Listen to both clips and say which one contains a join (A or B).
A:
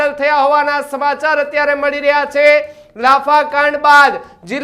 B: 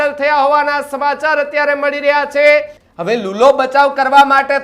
B